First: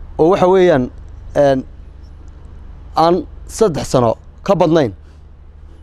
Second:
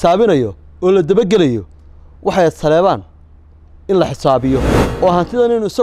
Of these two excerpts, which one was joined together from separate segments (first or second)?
second